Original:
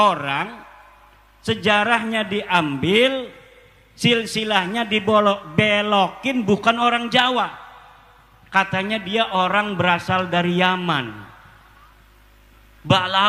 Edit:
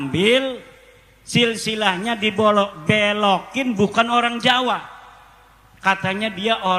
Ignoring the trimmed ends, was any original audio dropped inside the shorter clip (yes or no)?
no